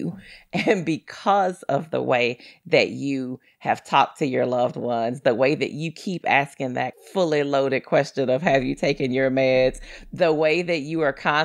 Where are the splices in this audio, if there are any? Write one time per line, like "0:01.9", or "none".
0:07.0